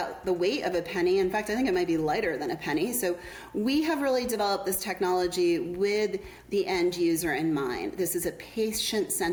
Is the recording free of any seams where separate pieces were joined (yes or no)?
yes